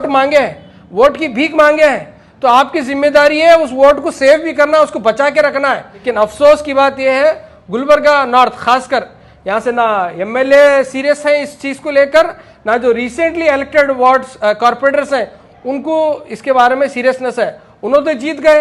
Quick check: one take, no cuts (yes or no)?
yes